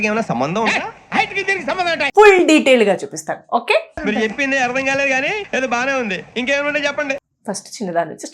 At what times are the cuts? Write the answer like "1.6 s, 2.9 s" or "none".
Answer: 2.1 s, 7.3 s